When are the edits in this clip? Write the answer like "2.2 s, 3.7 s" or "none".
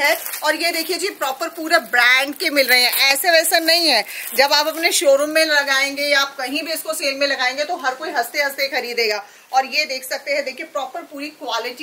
none